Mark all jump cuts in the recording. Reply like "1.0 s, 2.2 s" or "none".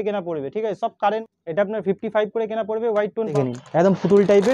1.2 s, 3.3 s